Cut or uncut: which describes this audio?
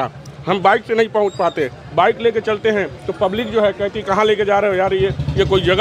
uncut